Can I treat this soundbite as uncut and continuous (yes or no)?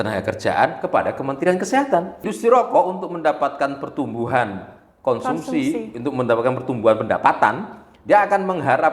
no